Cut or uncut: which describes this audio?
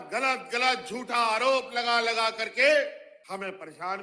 cut